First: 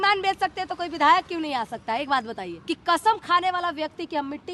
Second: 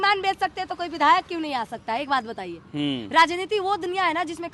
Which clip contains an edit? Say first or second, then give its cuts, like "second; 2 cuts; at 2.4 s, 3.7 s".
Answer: first; 1 cut; at 2.6 s